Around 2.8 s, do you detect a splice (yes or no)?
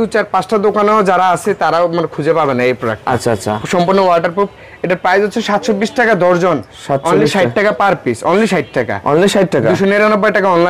no